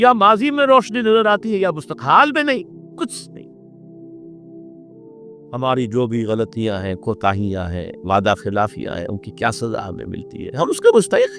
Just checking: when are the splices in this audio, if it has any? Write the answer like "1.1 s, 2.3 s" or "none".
3.1 s, 4.8 s